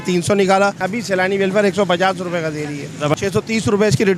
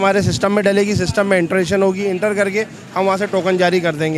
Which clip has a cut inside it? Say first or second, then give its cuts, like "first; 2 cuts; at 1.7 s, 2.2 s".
first; 2 cuts; at 0.9 s, 3.2 s